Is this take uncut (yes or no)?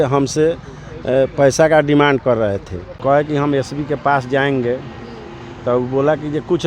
no